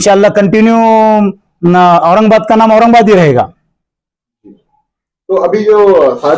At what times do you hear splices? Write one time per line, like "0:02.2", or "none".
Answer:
none

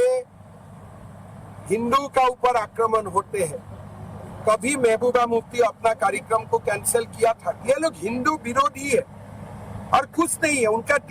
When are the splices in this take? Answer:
0:07.6

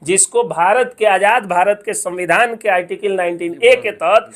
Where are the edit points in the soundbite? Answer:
none

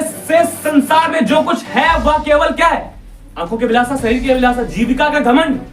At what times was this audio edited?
none

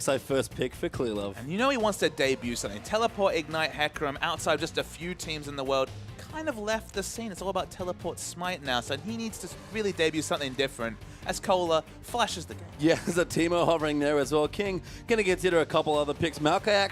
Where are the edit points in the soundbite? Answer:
0:01.4

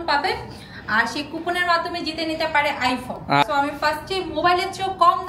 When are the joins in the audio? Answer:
0:03.4

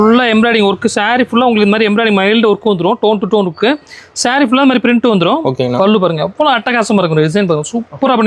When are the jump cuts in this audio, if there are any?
none

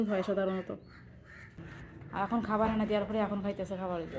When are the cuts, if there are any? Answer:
0:01.5

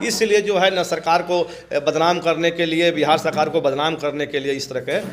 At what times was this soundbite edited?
none

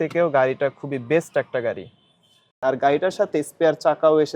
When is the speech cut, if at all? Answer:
0:02.5

